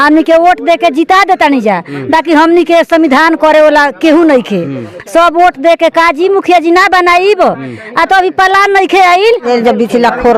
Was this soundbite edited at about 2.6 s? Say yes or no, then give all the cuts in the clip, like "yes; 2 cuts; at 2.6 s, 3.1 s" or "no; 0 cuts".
no; 1 cut; at 9.4 s